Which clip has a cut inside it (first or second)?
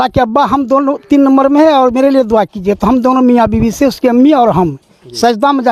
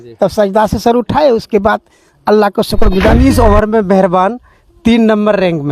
second